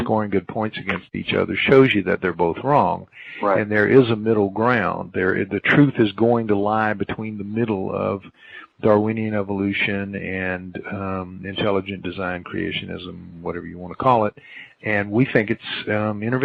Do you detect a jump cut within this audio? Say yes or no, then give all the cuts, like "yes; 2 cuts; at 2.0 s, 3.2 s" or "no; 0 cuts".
no; 0 cuts